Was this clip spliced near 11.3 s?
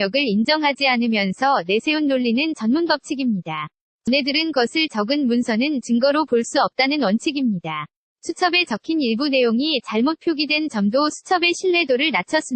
no; 1 cut; at 4.1 s

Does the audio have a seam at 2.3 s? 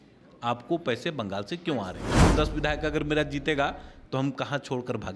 yes; 1 cut; at 2.3 s

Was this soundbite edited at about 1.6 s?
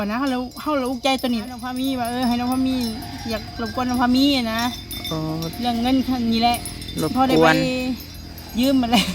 yes; 1 cut; at 1.6 s

